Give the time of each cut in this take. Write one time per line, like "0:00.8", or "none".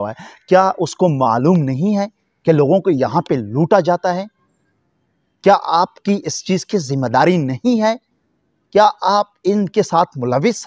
none